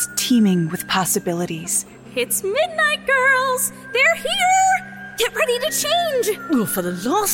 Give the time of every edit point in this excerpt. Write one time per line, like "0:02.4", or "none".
none